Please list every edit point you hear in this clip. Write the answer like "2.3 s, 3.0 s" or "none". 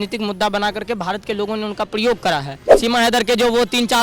2.7 s